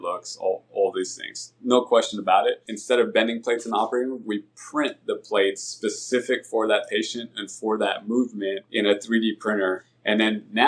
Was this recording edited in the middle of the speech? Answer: yes; 3 cuts; at 2.7 s, 8.6 s, 9.8 s

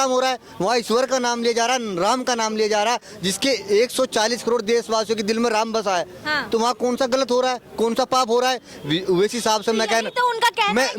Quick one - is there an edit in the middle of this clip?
no; 0 cuts

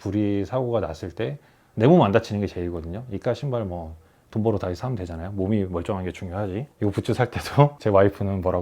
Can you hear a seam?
yes; 2 cuts; at 6.7 s, 7.8 s

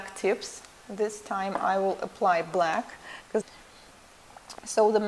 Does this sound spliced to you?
no; 0 cuts

